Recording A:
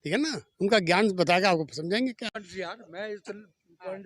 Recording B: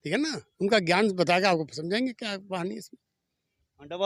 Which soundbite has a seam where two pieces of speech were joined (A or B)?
A